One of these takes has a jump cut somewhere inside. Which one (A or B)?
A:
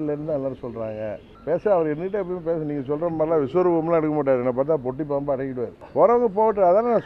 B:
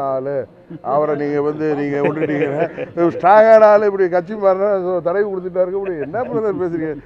A